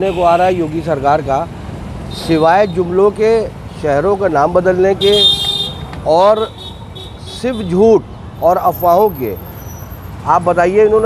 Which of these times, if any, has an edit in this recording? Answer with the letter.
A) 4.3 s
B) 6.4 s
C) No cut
C